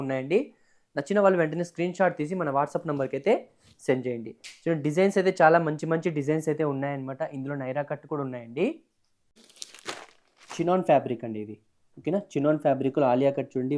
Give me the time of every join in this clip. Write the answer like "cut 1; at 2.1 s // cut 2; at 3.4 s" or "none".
cut 1; at 9.4 s